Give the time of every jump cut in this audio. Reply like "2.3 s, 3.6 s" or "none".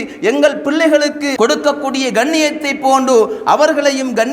1.3 s